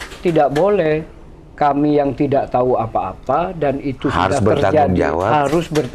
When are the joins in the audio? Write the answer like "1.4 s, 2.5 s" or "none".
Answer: none